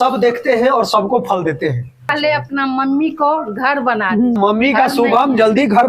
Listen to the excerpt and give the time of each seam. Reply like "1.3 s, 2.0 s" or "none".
2.1 s, 4.4 s